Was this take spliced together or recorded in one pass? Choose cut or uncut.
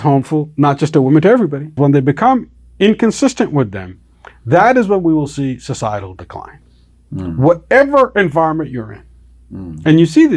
cut